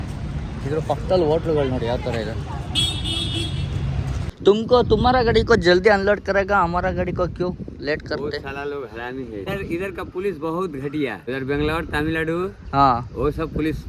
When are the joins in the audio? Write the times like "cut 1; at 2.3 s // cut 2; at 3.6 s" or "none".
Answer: cut 1; at 4.2 s // cut 2; at 9.6 s // cut 3; at 11.2 s

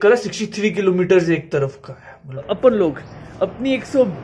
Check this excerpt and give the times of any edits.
cut 1; at 2.4 s

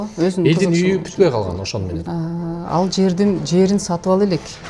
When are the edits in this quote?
cut 1; at 2.0 s

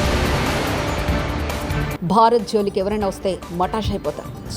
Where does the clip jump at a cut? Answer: cut 1; at 1.7 s

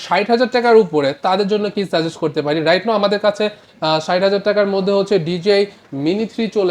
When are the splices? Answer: none

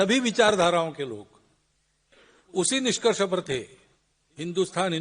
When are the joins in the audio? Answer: none

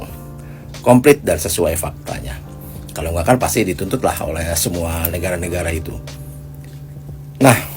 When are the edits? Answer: none

